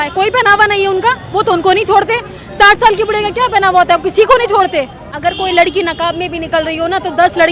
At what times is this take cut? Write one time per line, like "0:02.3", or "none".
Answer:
0:04.9

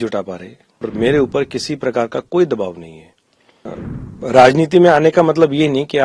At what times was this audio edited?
0:00.9
0:03.8

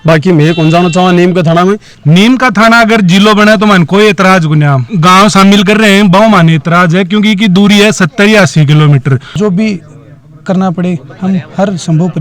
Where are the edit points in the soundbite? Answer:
0:01.9
0:04.9
0:09.3

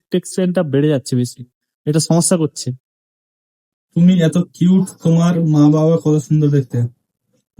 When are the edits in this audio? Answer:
0:03.5

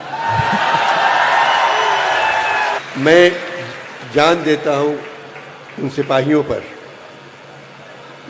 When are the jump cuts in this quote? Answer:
0:02.8

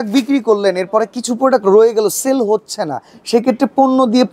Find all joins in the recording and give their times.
none

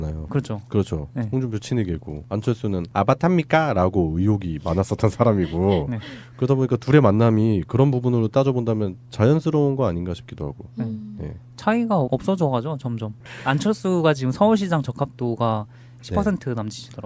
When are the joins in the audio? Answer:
none

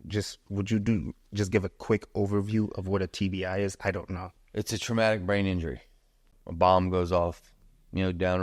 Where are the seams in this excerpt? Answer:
0:06.3

